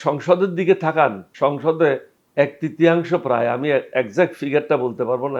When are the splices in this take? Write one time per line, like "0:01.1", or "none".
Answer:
0:01.2
0:02.2